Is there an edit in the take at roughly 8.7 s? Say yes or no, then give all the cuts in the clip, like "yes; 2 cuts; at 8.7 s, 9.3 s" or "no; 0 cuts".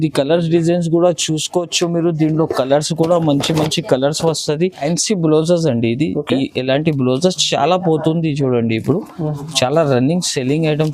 no; 1 cut; at 4.8 s